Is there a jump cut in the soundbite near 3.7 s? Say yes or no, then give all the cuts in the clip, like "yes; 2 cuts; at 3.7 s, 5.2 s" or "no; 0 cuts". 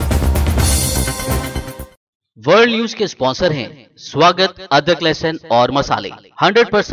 no; 1 cut; at 1.9 s